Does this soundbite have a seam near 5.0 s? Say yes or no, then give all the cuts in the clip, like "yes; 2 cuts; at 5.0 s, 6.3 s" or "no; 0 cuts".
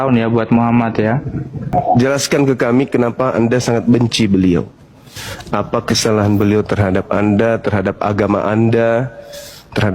no; 1 cut; at 1.7 s